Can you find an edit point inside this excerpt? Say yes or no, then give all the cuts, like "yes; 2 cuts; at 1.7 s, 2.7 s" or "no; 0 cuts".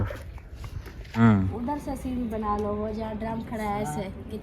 yes; 1 cut; at 1.2 s